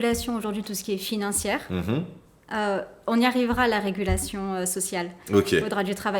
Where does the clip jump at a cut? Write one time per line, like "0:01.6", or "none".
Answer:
none